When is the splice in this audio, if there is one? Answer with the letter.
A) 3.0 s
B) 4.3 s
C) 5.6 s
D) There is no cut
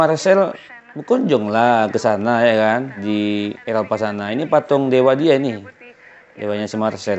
A